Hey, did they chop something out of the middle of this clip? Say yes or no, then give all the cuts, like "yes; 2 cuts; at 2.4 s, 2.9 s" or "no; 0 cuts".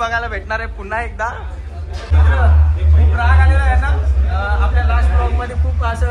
yes; 1 cut; at 2.1 s